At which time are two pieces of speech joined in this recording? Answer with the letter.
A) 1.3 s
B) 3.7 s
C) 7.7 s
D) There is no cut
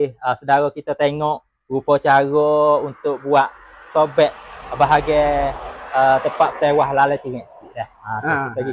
D